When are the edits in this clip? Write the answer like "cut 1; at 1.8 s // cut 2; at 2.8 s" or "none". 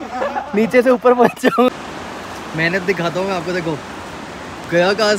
cut 1; at 1.7 s